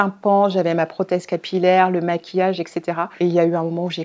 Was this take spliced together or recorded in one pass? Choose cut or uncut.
uncut